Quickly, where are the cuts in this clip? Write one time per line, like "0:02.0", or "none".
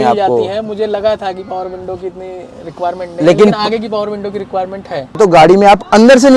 0:05.2